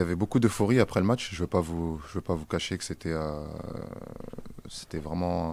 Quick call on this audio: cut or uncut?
uncut